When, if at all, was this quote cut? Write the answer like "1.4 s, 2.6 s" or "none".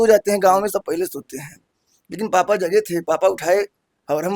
none